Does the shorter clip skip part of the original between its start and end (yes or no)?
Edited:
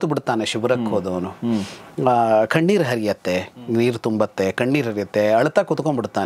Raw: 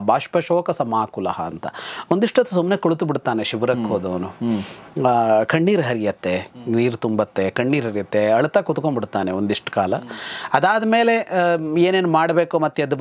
no